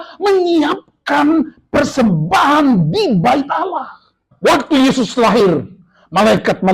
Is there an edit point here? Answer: yes; 1 cut; at 4.3 s

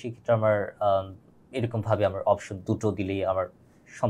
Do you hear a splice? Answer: no; 0 cuts

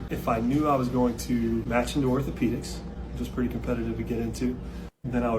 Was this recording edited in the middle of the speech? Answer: yes; 1 cut; at 3.3 s

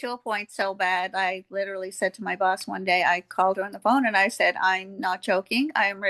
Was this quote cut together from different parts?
no; 0 cuts

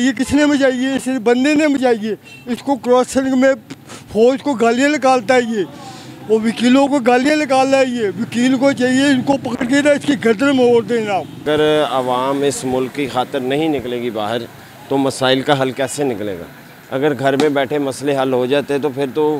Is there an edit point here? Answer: yes; 1 cut; at 11.4 s

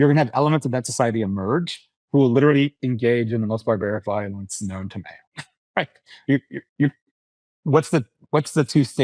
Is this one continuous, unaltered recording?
yes; 0 cuts

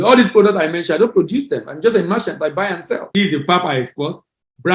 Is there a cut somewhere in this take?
yes; 1 cut; at 3.0 s

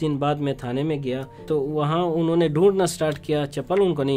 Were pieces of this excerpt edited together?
yes; 1 cut; at 1.5 s

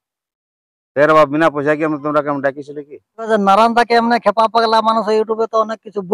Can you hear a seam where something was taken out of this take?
yes; 1 cut; at 3.3 s

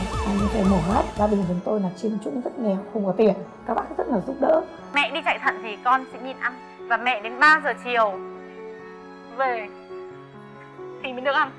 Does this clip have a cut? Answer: yes; 2 cuts; at 1.1 s, 4.8 s

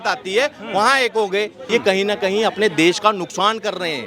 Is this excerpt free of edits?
no; 1 cut; at 1.6 s

